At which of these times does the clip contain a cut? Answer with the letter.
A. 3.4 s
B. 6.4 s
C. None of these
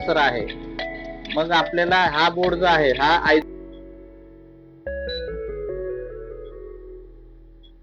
A